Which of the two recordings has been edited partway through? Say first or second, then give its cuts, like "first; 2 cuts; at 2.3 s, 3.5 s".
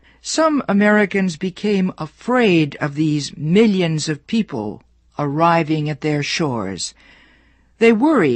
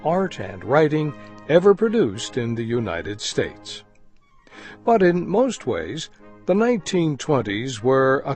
second; 1 cut; at 5.3 s